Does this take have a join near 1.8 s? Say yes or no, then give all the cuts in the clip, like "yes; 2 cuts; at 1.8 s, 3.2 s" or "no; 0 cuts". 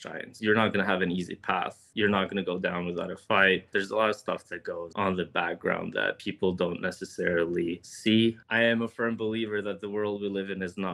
no; 0 cuts